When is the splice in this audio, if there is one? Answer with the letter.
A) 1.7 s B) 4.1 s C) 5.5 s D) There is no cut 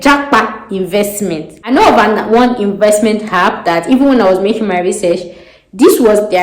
A